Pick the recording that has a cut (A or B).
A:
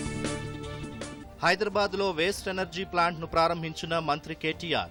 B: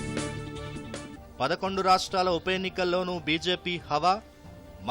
B